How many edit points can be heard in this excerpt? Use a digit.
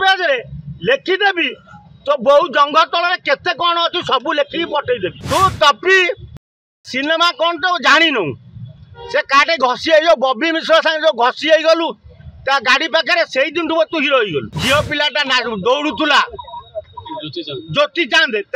2